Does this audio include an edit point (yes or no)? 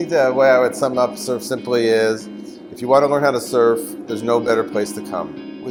no